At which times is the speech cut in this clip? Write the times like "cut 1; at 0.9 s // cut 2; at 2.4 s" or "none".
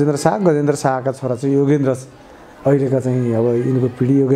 none